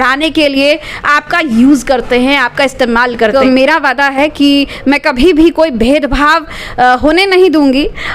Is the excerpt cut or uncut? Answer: cut